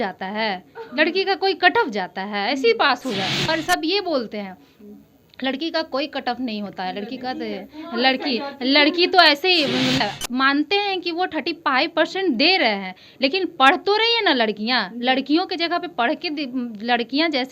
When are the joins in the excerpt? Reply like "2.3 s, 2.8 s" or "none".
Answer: 3.5 s, 10.0 s